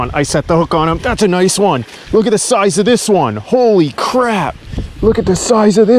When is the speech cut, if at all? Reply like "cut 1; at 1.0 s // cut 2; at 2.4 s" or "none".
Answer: none